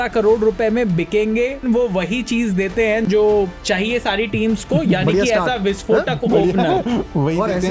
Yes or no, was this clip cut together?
yes